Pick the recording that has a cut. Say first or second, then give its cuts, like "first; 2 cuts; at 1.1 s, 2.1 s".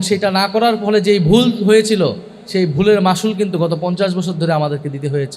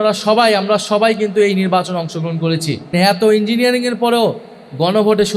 second; 1 cut; at 2.9 s